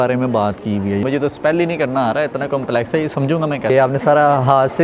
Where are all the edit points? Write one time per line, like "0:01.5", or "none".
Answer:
0:01.0
0:03.7